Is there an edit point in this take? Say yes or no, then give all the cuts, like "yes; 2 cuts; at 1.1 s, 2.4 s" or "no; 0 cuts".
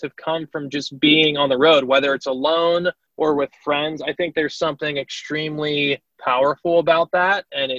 yes; 2 cuts; at 3.0 s, 6.1 s